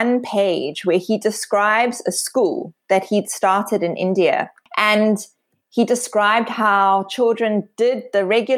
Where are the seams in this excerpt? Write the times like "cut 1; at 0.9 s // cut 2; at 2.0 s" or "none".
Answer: cut 1; at 4.6 s